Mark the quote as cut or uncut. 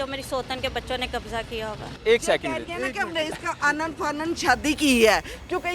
cut